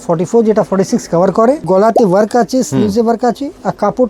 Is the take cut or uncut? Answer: cut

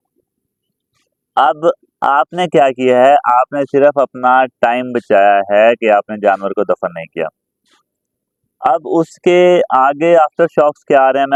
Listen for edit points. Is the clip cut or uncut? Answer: uncut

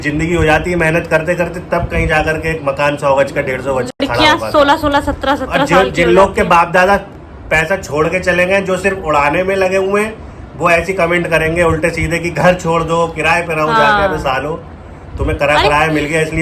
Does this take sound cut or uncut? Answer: uncut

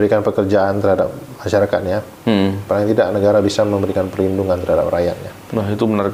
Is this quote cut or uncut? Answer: uncut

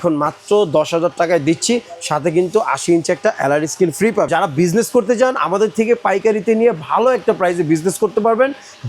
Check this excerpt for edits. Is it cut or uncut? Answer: cut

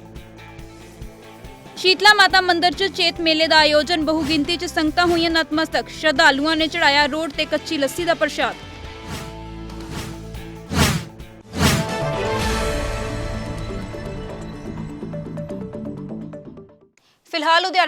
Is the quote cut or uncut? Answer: uncut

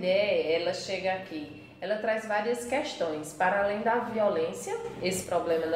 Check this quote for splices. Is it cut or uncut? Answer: uncut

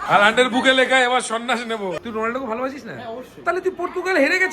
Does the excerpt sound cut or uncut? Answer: cut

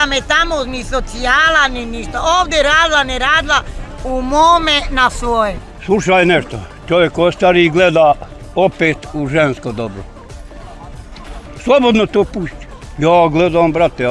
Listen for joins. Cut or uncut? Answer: cut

